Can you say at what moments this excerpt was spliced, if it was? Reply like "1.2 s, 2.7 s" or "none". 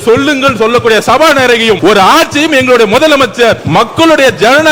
1.8 s, 3.6 s